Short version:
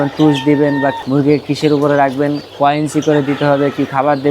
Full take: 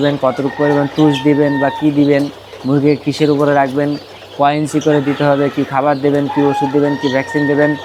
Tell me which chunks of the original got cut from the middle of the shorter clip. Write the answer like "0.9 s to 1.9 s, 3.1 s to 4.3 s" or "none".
1.8 s to 2.5 s, 4.0 s to 4.2 s